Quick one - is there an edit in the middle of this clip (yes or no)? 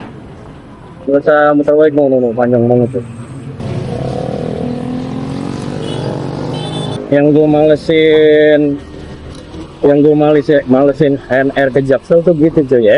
yes